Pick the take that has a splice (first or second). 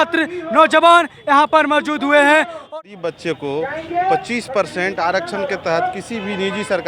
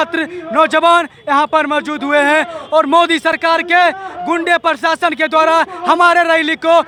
first